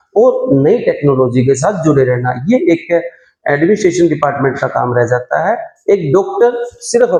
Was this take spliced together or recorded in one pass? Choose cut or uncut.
uncut